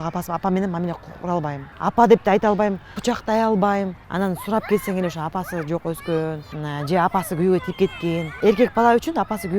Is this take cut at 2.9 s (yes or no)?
yes